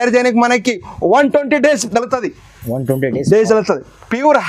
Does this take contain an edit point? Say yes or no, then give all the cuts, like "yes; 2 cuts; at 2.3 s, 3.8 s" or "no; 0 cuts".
no; 0 cuts